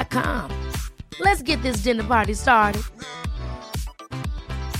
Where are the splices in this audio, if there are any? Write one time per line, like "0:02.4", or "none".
none